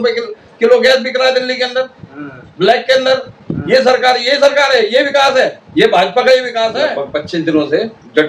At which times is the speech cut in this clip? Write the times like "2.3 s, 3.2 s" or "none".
6.8 s